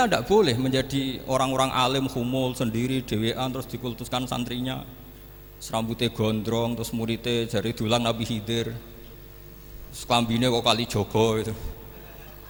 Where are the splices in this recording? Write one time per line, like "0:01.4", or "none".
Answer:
none

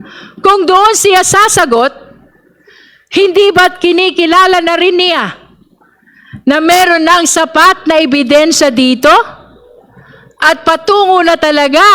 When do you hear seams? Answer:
none

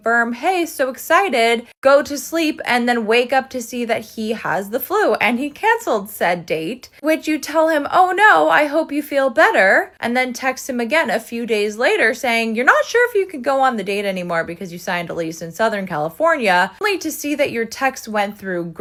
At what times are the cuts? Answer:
none

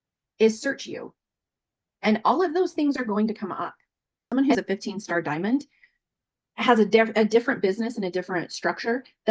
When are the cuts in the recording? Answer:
0:04.2

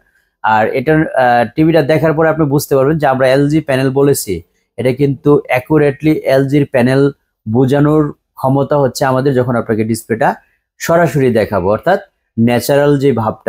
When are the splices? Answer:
none

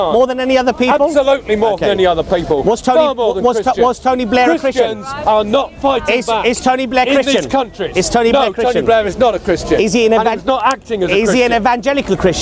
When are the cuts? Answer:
none

